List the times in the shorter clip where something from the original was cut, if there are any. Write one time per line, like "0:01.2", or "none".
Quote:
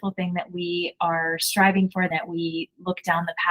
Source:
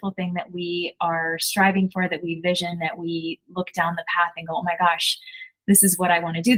0:02.1